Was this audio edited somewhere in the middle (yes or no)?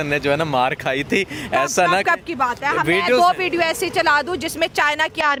no